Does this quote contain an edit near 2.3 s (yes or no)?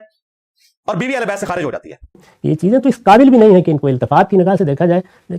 yes